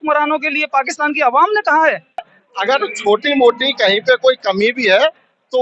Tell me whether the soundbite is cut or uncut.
cut